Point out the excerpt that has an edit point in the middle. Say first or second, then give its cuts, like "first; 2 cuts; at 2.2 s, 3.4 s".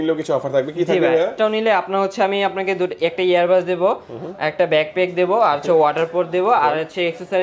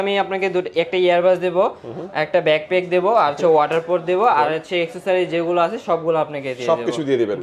first; 1 cut; at 1.3 s